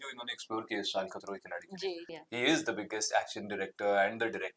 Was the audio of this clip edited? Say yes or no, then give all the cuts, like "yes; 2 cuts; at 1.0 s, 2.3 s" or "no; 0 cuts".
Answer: yes; 1 cut; at 2.1 s